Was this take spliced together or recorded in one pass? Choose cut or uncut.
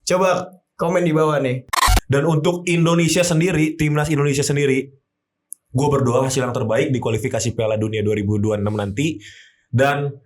cut